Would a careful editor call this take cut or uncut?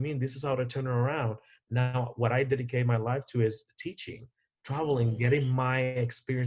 uncut